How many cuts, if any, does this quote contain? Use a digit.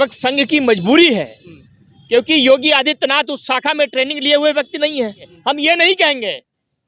1